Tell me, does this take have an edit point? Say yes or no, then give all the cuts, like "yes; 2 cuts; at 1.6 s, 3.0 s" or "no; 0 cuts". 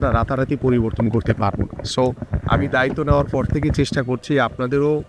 no; 0 cuts